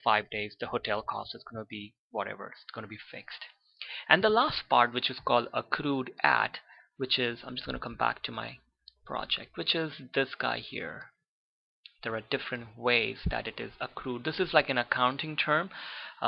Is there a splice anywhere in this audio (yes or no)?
yes